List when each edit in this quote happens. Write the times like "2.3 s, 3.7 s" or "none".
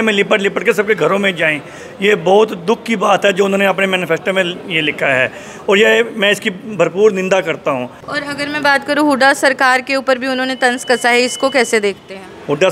none